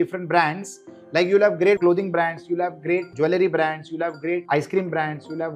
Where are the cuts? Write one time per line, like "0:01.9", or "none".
0:01.8
0:03.1
0:04.4

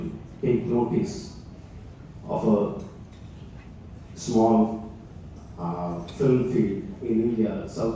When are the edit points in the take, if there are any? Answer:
none

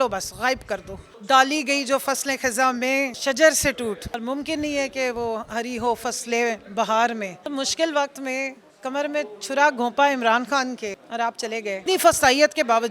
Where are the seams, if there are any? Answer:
0:01.1
0:03.2
0:04.2
0:07.4
0:11.0
0:11.8

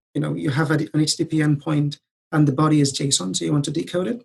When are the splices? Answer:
none

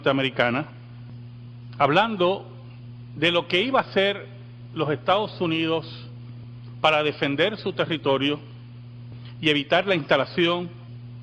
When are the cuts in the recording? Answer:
0:05.1

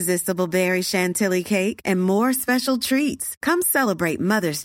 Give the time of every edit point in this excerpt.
none

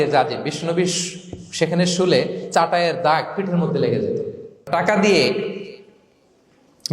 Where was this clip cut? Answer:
0:04.7

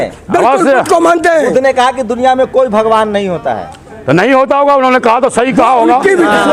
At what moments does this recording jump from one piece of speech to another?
none

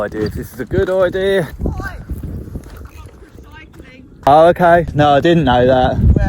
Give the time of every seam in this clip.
0:01.5
0:04.3
0:04.9

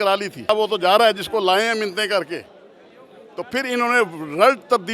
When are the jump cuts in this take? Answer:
none

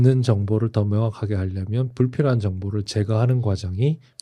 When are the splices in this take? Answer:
none

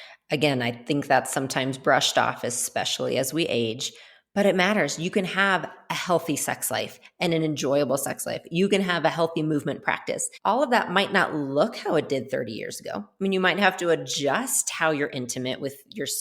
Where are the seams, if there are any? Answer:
0:10.3

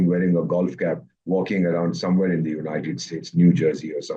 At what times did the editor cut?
none

